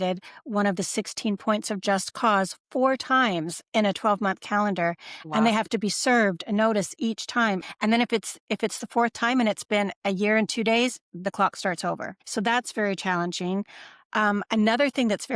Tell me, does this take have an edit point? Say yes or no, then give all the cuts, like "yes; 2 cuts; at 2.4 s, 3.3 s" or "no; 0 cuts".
yes; 1 cut; at 7.6 s